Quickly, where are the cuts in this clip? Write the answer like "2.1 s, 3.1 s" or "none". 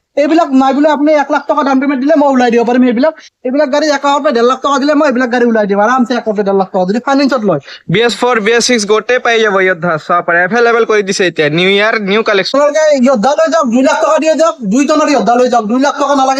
12.5 s